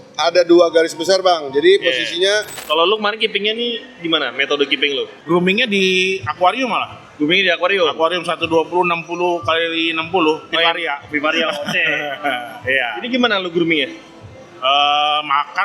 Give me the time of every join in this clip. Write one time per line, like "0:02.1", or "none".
0:02.6
0:05.1